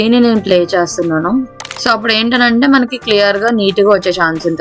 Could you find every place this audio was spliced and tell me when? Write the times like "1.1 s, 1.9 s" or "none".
1.8 s